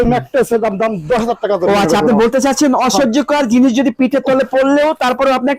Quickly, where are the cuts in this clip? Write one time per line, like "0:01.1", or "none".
none